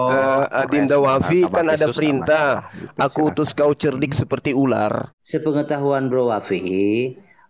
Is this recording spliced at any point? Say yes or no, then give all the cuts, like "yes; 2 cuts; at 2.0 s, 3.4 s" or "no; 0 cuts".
yes; 1 cut; at 5.1 s